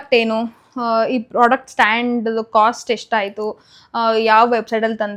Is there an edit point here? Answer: no; 0 cuts

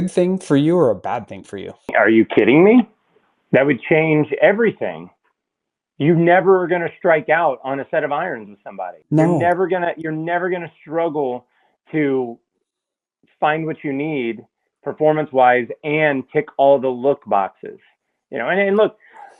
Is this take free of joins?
no; 2 cuts; at 1.9 s, 8.9 s

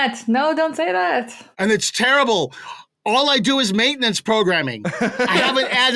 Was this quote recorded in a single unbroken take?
yes; 0 cuts

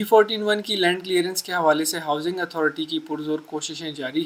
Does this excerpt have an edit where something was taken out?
no; 0 cuts

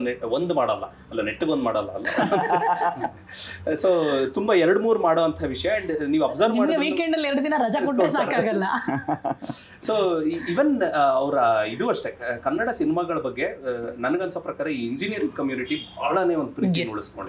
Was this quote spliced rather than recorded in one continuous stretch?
no; 0 cuts

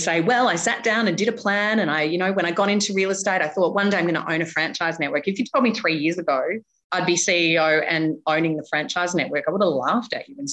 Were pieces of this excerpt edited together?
no; 0 cuts

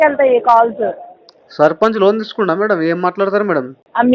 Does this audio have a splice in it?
no; 0 cuts

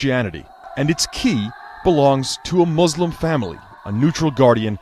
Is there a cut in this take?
no; 0 cuts

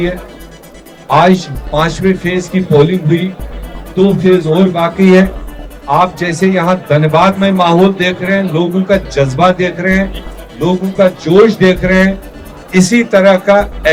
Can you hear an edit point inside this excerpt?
no; 0 cuts

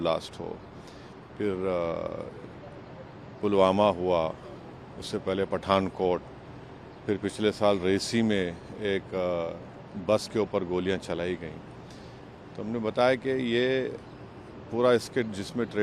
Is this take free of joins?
yes; 0 cuts

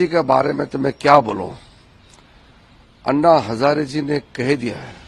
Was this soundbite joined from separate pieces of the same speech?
no; 0 cuts

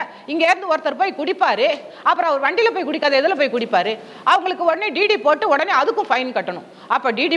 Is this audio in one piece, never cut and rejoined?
yes; 0 cuts

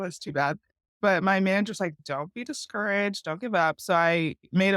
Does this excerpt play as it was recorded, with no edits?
no; 2 cuts; at 1.0 s, 2.0 s

